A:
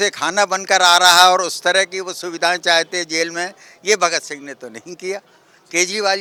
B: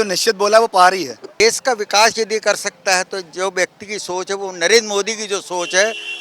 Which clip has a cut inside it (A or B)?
B